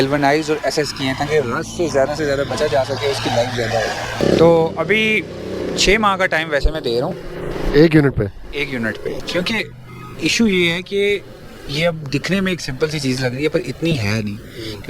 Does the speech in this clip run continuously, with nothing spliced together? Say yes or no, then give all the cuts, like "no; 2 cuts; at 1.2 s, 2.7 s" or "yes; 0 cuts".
no; 1 cut; at 4.2 s